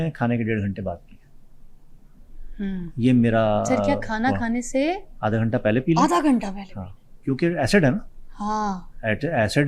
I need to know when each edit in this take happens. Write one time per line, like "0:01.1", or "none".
none